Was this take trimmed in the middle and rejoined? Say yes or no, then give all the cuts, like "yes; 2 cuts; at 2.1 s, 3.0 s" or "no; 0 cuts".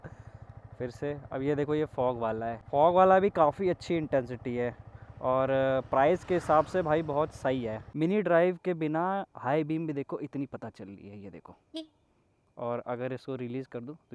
yes; 2 cuts; at 2.6 s, 7.8 s